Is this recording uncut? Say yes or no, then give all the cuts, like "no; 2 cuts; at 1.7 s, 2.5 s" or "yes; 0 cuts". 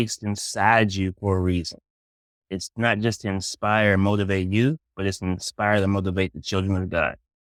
yes; 0 cuts